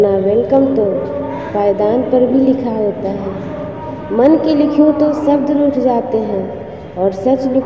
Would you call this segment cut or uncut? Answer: uncut